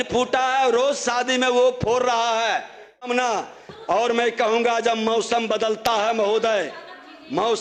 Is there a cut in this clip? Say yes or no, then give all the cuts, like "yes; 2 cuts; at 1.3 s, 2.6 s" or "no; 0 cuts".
yes; 1 cut; at 3.0 s